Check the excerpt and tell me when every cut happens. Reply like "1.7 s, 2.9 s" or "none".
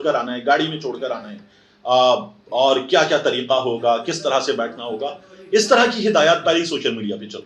none